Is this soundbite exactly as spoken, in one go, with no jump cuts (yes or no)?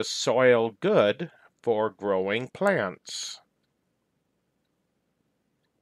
yes